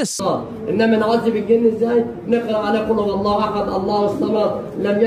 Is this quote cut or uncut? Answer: uncut